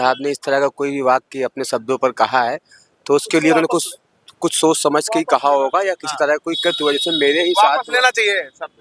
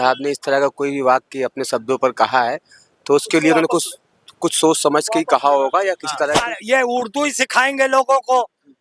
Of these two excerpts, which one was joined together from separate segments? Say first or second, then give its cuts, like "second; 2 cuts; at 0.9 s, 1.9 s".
second; 1 cut; at 6.5 s